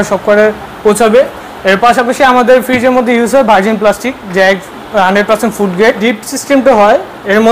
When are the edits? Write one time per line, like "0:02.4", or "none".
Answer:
0:06.0